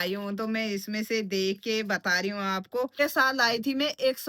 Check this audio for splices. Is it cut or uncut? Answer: cut